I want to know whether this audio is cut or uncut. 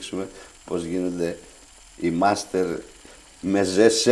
uncut